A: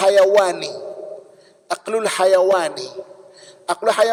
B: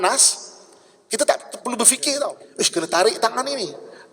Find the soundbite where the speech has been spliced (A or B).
B